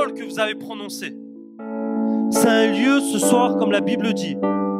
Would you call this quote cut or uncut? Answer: cut